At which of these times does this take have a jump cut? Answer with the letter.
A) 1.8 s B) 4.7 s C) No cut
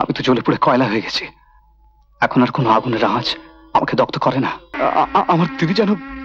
B